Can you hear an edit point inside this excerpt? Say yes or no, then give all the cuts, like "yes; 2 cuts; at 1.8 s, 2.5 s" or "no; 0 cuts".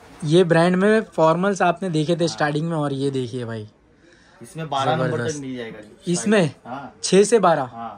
no; 0 cuts